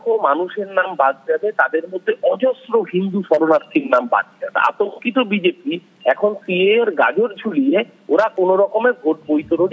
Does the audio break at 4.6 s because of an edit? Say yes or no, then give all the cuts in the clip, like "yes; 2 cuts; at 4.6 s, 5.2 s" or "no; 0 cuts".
yes; 1 cut; at 4.6 s